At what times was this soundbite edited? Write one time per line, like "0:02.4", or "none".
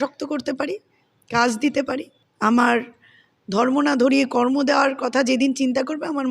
0:02.2